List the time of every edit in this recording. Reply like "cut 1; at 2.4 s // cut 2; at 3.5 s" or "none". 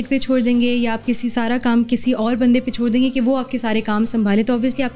none